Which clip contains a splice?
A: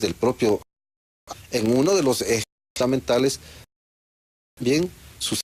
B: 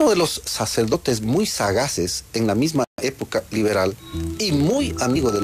B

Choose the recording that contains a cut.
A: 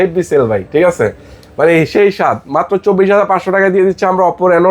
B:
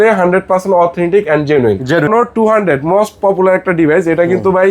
B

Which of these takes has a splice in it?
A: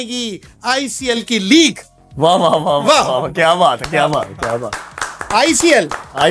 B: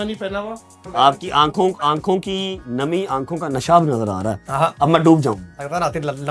B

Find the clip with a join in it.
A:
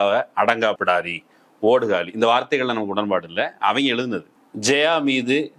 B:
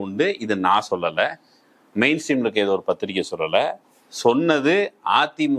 A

